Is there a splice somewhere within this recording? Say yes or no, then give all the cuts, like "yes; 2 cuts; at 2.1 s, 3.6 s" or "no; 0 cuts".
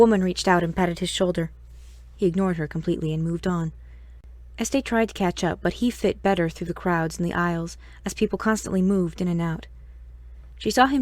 yes; 1 cut; at 4.5 s